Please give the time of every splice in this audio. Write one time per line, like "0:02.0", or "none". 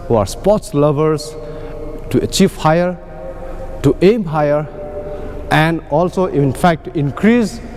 none